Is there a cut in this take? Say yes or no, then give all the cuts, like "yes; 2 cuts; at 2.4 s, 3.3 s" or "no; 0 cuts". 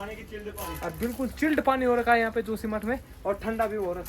no; 0 cuts